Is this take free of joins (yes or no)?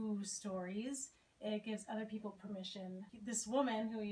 no